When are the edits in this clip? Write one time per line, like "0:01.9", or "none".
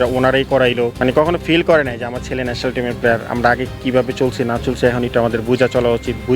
0:00.9

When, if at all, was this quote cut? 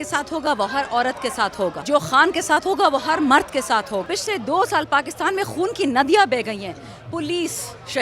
0:01.8
0:04.0

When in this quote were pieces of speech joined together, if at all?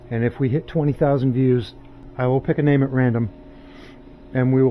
0:02.0

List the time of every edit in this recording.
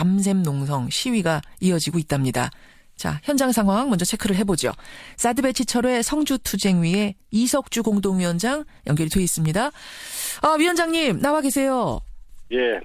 none

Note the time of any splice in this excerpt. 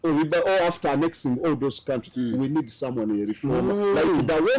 none

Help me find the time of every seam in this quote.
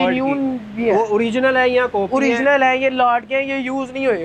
none

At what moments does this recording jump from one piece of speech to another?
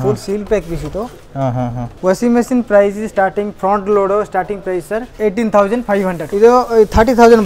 0:01.9
0:05.1
0:06.2

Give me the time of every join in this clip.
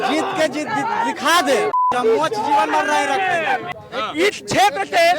0:03.8

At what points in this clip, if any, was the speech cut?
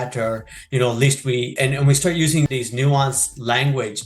0:01.5
0:02.5

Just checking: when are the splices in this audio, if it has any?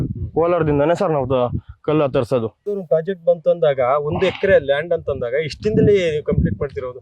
0:02.7

